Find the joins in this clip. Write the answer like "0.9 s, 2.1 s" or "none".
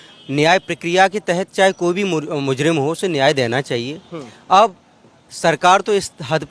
none